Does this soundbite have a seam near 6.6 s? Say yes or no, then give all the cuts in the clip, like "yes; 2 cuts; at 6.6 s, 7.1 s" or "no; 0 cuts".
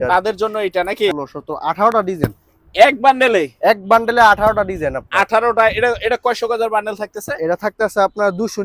no; 1 cut; at 1.1 s